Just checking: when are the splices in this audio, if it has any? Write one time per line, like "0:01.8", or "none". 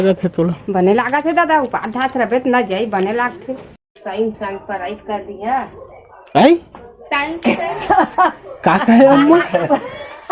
0:03.9

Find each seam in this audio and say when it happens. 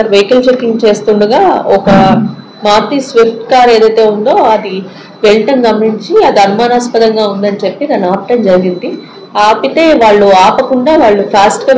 none

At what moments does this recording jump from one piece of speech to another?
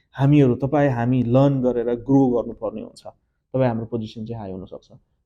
none

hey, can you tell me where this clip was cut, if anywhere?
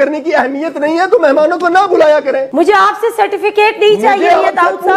0:02.5

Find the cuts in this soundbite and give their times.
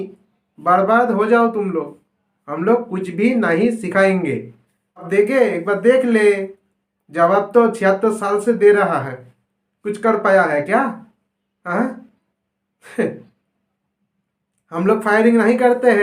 0:05.1

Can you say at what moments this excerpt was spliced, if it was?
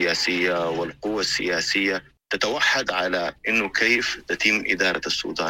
0:02.2

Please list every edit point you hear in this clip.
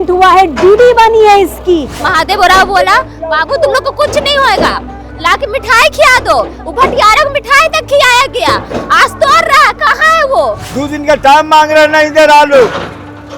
0:02.0
0:10.7

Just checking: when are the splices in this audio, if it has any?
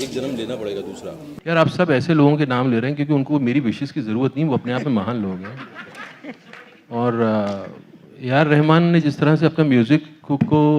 0:01.3

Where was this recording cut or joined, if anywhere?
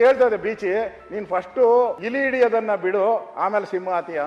0:02.0

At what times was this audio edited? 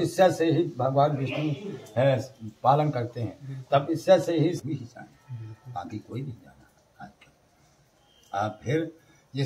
0:04.6

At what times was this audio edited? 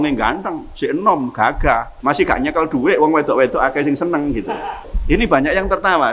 0:01.9
0:04.9

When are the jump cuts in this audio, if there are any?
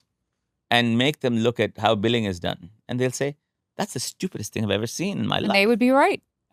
none

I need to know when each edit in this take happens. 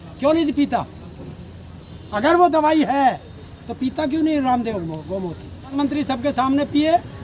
0:05.8

